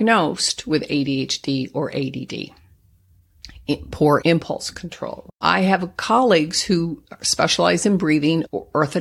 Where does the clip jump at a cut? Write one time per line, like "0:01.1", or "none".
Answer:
0:05.4